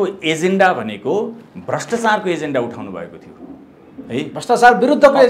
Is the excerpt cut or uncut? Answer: uncut